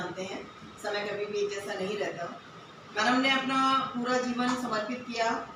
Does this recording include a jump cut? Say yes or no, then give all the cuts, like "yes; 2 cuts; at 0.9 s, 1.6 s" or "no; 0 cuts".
no; 0 cuts